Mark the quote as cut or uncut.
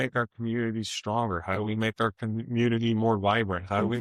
uncut